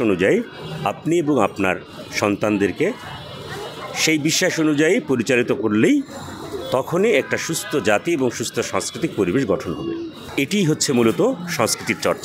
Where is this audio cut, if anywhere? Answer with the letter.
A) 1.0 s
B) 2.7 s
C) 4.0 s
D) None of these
D